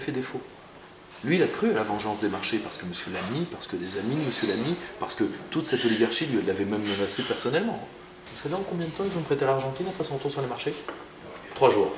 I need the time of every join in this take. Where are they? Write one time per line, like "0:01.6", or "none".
0:08.3